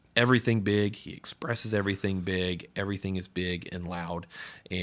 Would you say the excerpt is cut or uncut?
uncut